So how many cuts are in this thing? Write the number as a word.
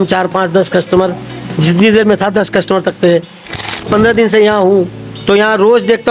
one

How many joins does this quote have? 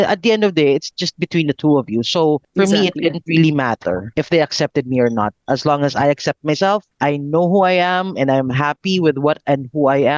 three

